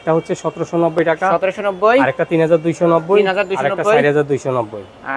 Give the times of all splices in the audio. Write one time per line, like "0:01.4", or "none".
none

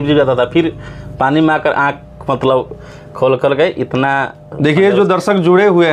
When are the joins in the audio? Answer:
none

